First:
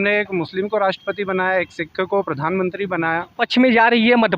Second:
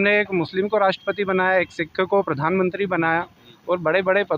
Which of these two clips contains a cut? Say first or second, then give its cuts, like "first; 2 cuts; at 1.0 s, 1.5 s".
first; 1 cut; at 3.4 s